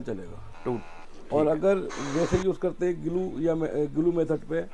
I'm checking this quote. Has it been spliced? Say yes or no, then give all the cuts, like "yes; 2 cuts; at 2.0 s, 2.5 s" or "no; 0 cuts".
no; 0 cuts